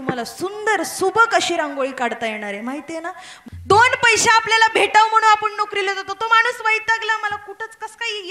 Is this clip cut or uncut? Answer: cut